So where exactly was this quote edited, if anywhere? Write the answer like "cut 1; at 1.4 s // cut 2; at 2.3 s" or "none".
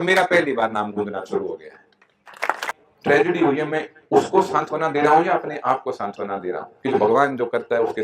cut 1; at 2.6 s